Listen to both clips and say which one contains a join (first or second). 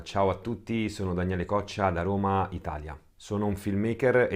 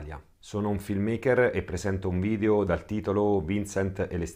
second